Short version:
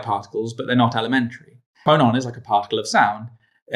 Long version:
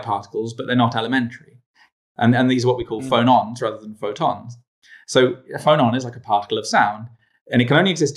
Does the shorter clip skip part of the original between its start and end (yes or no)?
yes